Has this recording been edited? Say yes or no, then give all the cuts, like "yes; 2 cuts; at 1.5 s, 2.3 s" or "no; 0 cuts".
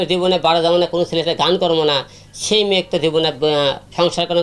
no; 0 cuts